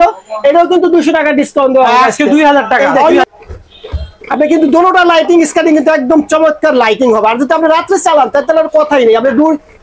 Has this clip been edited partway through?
yes; 1 cut; at 3.2 s

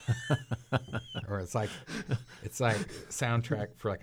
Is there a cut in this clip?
yes; 1 cut; at 1.1 s

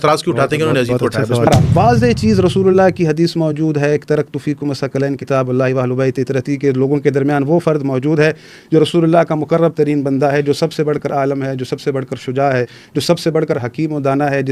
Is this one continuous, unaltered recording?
no; 1 cut; at 1.5 s

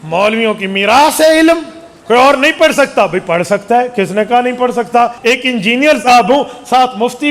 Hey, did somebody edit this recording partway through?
yes; 2 cuts; at 1.9 s, 5.2 s

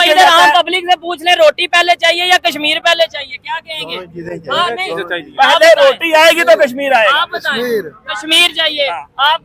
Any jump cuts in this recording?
no; 0 cuts

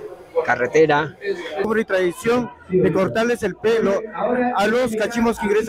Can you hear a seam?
yes; 1 cut; at 1.7 s

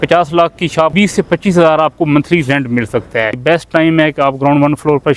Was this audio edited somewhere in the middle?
yes; 2 cuts; at 0.9 s, 3.4 s

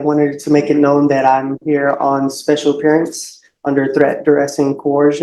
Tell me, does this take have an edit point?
no; 0 cuts

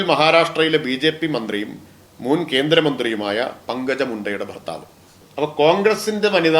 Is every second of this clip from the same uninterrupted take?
no; 1 cut; at 5.2 s

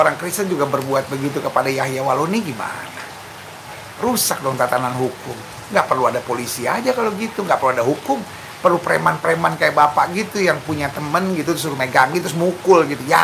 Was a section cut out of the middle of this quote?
no; 0 cuts

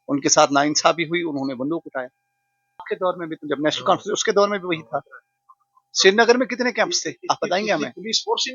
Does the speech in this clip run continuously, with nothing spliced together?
no; 1 cut; at 2.8 s

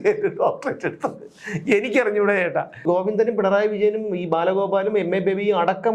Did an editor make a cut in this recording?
yes; 1 cut; at 2.8 s

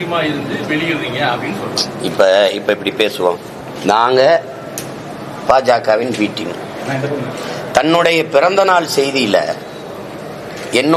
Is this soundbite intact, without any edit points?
yes; 0 cuts

